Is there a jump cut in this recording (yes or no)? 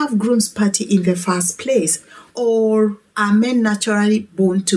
no